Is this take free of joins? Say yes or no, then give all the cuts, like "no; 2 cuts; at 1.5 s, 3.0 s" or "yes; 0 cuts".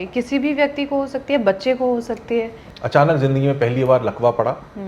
no; 1 cut; at 2.6 s